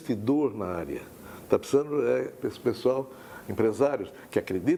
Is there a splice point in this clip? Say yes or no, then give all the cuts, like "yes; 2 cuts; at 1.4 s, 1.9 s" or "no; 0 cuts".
no; 0 cuts